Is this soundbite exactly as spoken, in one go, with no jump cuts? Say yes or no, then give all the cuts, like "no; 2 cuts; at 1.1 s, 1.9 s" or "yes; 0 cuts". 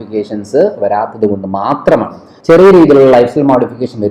no; 1 cut; at 2.3 s